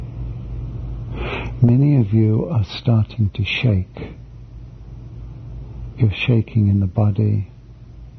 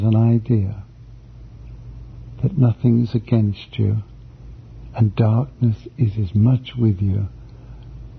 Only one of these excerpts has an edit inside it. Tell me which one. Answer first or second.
first